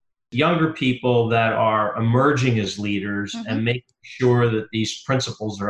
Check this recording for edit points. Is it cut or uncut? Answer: uncut